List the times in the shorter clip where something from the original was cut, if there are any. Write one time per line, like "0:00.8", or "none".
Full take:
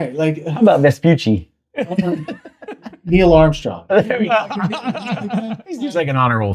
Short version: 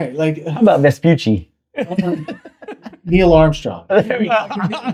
none